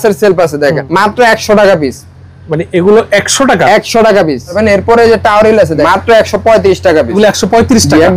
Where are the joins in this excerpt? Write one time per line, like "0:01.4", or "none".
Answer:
0:00.8
0:04.6
0:05.8
0:07.1